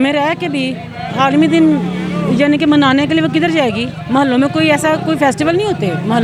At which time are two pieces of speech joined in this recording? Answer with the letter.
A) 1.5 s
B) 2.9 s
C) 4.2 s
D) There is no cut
D